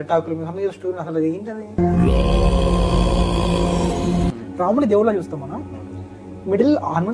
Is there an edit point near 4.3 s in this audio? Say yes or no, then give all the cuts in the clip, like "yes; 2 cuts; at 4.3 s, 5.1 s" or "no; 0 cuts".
yes; 2 cuts; at 1.8 s, 4.3 s